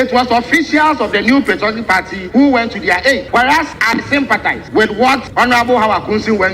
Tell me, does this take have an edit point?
yes; 4 cuts; at 2.2 s, 3.5 s, 4.6 s, 5.3 s

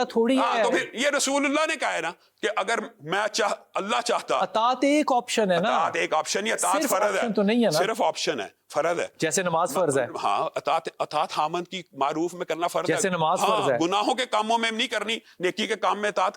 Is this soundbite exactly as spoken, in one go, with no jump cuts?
yes; 0 cuts

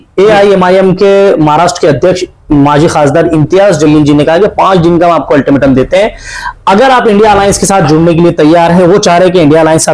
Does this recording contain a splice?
no; 0 cuts

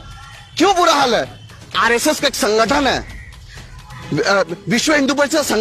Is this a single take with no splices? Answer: yes; 0 cuts

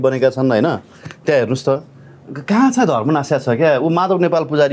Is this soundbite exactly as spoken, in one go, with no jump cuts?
yes; 0 cuts

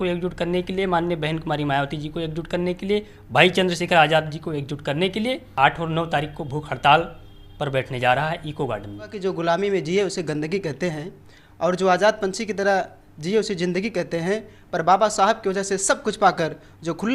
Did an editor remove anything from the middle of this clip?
yes; 2 cuts; at 5.5 s, 9.2 s

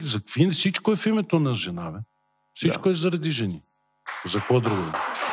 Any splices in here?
no; 0 cuts

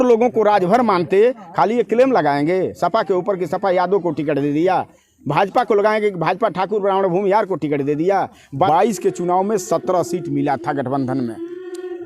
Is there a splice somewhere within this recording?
yes; 1 cut; at 8.7 s

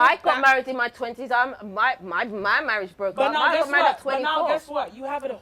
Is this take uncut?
yes; 0 cuts

